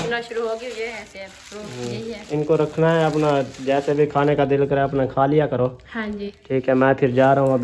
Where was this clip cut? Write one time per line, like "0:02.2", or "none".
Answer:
none